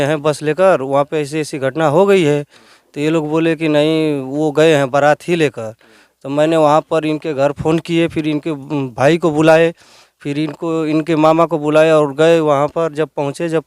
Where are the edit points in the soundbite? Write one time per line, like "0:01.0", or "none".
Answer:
none